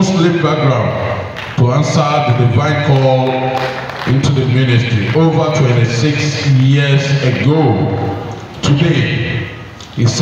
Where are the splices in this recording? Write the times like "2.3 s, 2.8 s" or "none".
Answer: none